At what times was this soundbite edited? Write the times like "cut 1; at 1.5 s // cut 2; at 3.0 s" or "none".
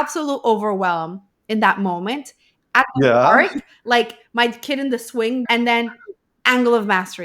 cut 1; at 5.4 s